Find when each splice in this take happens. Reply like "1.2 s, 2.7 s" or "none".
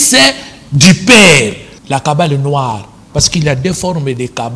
1.7 s